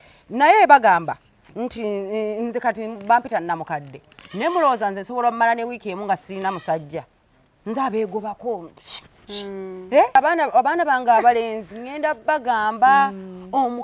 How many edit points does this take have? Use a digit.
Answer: 1